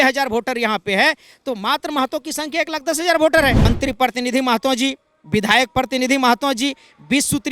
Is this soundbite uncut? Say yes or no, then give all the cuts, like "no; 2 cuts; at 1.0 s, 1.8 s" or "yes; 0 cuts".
no; 1 cut; at 3.6 s